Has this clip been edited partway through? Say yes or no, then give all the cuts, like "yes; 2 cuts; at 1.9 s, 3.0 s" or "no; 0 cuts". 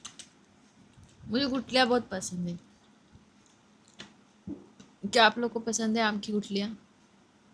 no; 0 cuts